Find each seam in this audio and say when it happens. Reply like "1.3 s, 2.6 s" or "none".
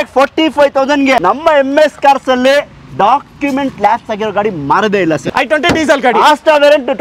1.2 s, 5.3 s